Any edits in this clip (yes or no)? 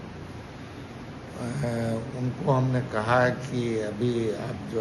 no